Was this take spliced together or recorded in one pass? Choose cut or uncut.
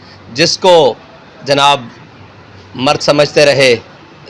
uncut